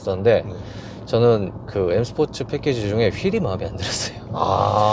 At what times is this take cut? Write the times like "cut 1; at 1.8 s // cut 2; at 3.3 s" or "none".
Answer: none